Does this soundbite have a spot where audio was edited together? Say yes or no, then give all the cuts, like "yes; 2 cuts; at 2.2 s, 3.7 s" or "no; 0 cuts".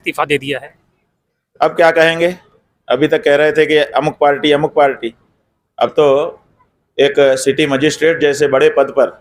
no; 0 cuts